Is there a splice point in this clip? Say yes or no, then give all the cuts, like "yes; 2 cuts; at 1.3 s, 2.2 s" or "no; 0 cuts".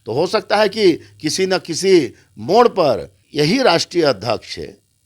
yes; 1 cut; at 3.2 s